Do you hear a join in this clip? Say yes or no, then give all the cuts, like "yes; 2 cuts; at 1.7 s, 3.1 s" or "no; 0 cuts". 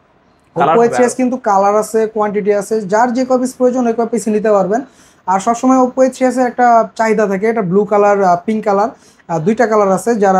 no; 0 cuts